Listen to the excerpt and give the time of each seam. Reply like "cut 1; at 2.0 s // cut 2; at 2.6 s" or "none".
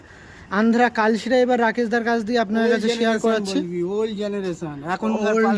none